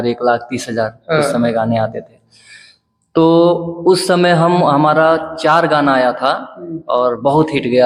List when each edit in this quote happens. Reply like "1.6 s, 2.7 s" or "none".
none